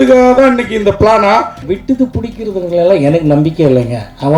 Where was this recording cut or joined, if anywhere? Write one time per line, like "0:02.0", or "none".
0:01.6